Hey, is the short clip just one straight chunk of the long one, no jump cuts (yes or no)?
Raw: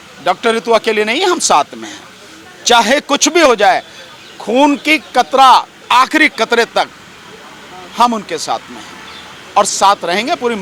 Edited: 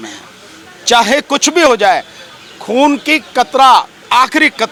yes